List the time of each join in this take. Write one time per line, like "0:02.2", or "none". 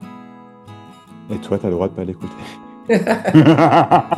0:01.3